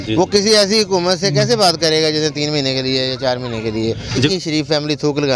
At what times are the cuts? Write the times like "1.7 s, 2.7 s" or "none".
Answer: 4.2 s